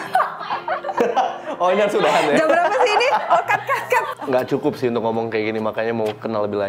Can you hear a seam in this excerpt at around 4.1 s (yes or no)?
yes